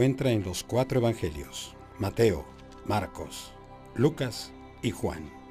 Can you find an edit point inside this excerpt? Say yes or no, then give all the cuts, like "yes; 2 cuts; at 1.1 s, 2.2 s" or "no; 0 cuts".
no; 0 cuts